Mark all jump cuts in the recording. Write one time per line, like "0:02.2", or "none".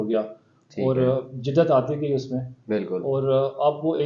none

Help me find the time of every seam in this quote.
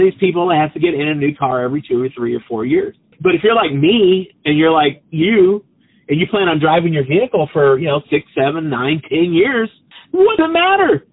0:03.1
0:09.9

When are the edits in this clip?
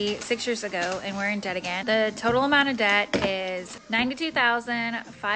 0:01.8
0:03.7

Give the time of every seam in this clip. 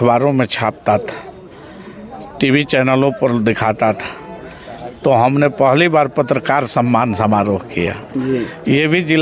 none

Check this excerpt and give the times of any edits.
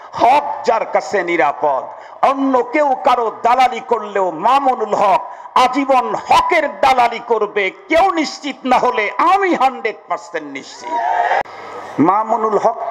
0:11.4

